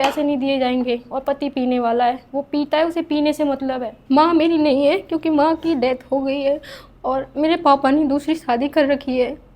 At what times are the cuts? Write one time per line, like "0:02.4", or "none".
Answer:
0:03.9